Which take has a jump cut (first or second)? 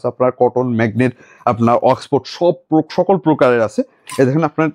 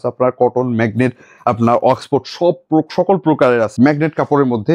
second